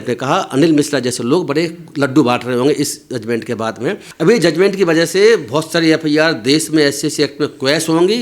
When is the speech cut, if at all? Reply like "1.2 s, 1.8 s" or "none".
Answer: 4.0 s